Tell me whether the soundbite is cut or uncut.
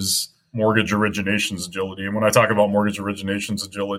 uncut